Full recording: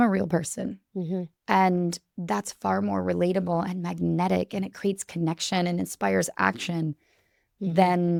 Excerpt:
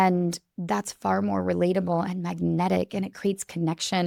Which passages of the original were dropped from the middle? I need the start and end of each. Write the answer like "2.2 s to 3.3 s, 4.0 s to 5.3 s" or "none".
none